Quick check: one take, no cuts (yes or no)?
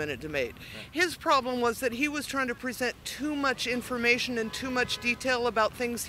yes